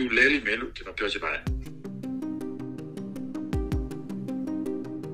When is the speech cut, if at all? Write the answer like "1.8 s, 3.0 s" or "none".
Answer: 1.4 s